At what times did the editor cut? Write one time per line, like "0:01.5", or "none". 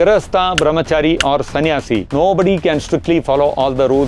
0:02.1